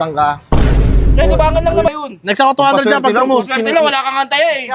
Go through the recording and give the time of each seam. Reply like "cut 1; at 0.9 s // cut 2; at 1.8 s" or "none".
cut 1; at 1.9 s